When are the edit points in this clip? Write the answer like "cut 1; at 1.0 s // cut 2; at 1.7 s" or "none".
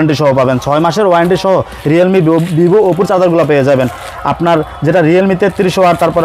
none